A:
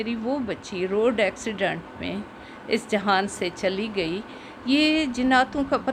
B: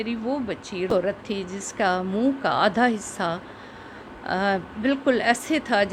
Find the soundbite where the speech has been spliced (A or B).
B